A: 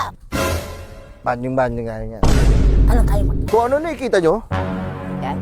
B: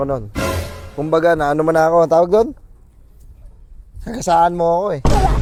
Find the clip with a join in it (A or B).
A